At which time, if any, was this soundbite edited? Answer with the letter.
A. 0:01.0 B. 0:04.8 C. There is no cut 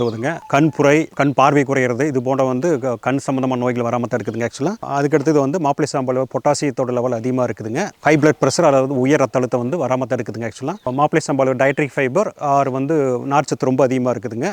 B